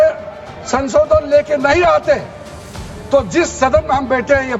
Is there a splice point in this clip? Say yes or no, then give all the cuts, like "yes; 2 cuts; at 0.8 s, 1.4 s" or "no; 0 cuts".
no; 0 cuts